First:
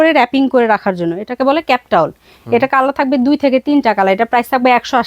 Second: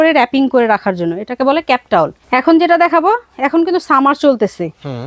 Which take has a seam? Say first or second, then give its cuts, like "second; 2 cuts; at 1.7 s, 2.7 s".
second; 1 cut; at 2.2 s